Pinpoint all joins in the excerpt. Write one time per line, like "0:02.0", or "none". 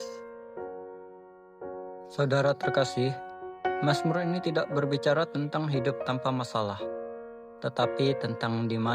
0:02.1